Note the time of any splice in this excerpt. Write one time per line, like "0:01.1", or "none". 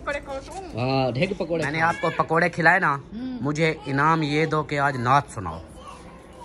0:01.7